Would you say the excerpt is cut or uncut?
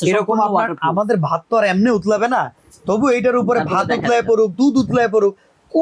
uncut